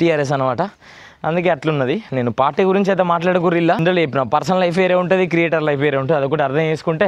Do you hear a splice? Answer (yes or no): yes